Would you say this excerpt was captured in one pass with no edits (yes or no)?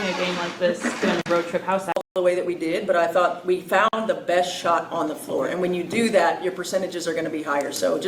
no